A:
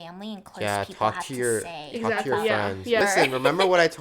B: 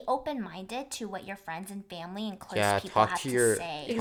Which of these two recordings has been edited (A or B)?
A